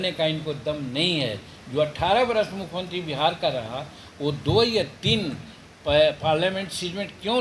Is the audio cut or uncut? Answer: uncut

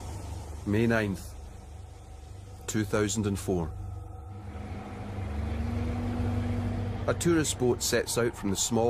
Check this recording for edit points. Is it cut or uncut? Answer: uncut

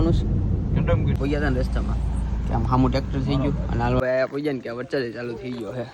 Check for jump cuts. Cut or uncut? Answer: cut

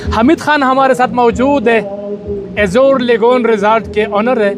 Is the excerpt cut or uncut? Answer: uncut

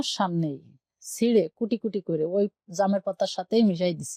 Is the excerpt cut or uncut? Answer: uncut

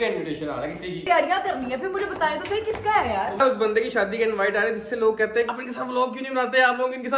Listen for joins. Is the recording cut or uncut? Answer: cut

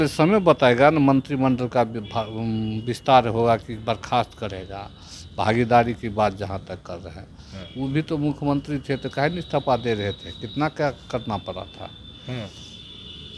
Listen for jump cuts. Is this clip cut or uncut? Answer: uncut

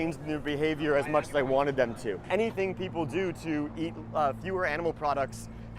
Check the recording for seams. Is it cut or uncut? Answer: cut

